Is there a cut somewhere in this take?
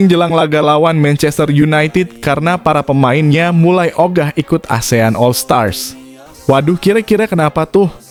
no; 0 cuts

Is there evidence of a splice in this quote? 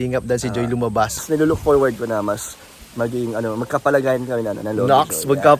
yes; 1 cut; at 1.2 s

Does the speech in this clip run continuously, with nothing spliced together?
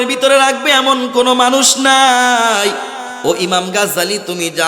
no; 1 cut; at 3.0 s

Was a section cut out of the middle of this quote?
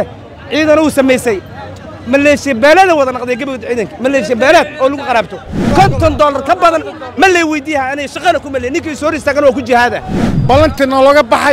yes; 2 cuts; at 5.7 s, 10.3 s

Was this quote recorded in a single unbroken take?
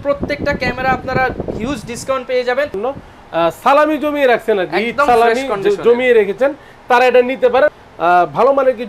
no; 2 cuts; at 2.8 s, 7.7 s

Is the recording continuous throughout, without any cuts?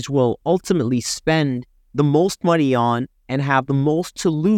yes; 0 cuts

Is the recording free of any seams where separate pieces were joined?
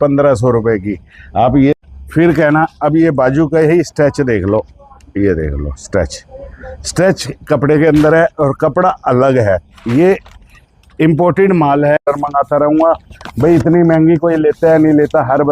no; 2 cuts; at 1.8 s, 12.0 s

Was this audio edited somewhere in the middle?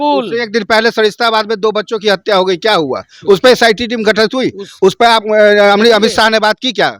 no; 0 cuts

